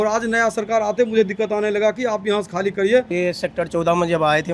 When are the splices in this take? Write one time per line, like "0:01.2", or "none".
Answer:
0:03.1

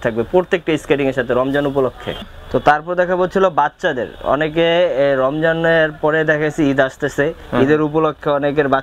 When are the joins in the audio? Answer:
none

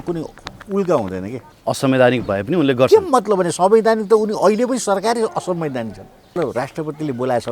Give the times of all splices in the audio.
0:01.5
0:06.3

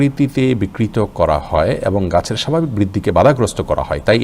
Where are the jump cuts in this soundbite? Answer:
none

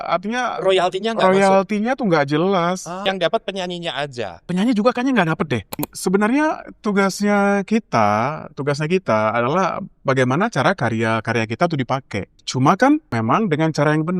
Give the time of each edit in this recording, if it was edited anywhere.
0:03.0
0:04.4
0:05.9
0:12.4
0:13.1

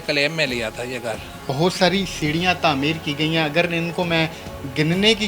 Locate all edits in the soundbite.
0:01.5

